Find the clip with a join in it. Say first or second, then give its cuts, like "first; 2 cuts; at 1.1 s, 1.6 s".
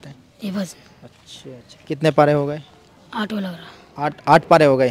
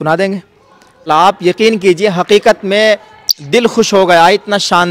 second; 1 cut; at 1.1 s